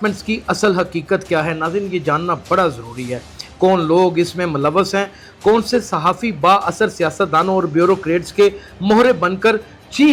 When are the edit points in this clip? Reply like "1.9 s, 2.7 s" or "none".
none